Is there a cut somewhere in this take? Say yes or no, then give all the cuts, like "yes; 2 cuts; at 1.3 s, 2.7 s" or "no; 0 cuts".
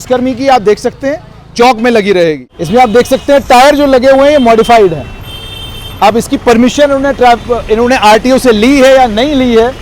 yes; 1 cut; at 2.5 s